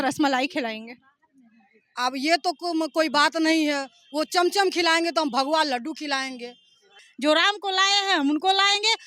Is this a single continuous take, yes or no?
no